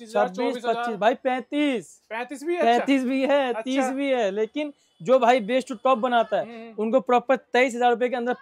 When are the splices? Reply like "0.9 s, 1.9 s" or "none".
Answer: none